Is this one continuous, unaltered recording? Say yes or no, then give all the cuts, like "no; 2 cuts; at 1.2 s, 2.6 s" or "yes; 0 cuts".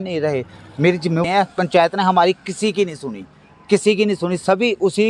no; 1 cut; at 1.2 s